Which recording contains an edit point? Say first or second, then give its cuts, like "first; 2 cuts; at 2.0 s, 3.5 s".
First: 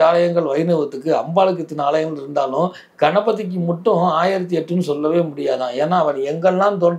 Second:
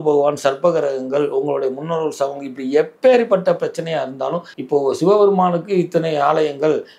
second; 1 cut; at 4.5 s